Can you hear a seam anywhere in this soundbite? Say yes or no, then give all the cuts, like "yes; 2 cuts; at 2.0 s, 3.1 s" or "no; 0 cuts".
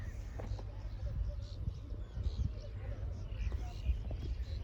no; 0 cuts